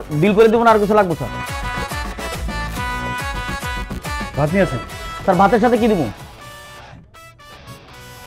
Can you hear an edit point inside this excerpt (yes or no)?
no